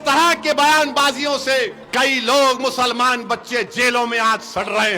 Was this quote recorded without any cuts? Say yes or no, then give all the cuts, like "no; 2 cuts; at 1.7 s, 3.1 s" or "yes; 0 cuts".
no; 1 cut; at 1.8 s